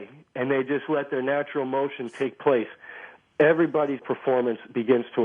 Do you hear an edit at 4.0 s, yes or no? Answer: yes